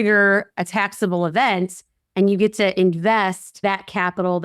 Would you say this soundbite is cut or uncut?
cut